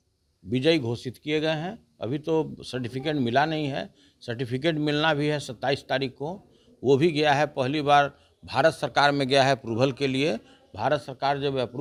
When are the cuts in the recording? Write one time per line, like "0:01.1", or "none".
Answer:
none